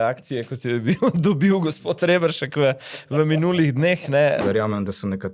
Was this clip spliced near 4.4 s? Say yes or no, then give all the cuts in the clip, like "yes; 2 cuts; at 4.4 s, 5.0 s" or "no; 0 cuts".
yes; 1 cut; at 4.4 s